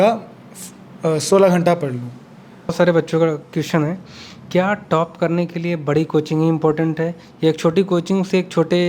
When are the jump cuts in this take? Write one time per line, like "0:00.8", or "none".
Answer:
0:02.7